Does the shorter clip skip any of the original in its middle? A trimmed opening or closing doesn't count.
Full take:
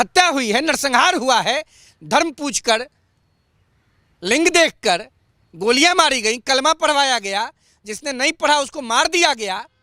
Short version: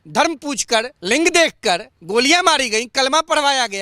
yes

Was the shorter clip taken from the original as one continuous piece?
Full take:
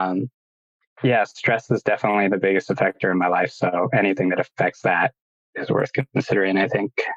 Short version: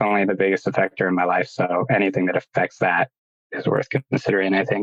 yes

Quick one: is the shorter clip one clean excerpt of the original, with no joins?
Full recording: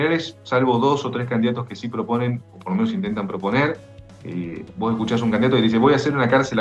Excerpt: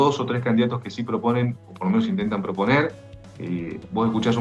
yes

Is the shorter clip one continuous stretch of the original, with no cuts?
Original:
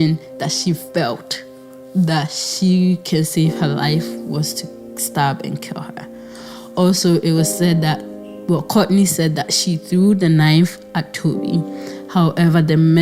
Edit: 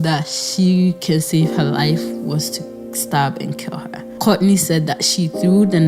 no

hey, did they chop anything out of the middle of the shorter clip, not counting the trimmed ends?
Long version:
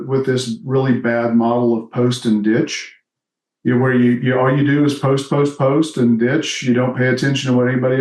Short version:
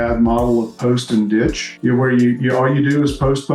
yes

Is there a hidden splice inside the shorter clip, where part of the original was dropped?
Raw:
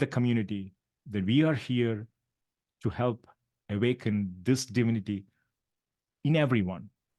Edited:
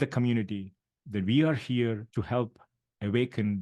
yes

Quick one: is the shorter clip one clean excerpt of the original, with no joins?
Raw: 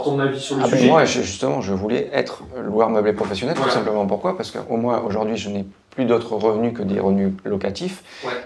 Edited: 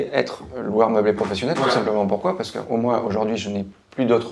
yes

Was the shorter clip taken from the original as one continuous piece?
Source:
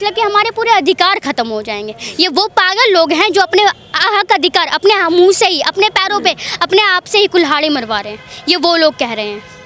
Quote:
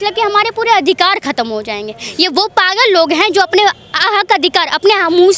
yes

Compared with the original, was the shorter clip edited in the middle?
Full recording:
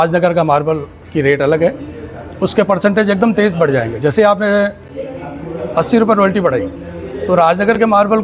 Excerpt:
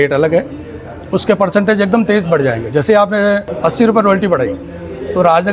yes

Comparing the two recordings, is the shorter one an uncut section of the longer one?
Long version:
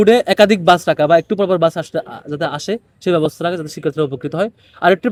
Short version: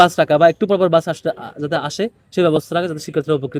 yes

